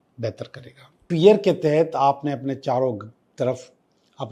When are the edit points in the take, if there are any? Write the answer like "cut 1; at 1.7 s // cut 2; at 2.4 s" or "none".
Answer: cut 1; at 1.0 s